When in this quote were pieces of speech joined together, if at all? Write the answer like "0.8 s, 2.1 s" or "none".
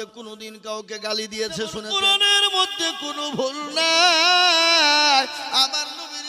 1.8 s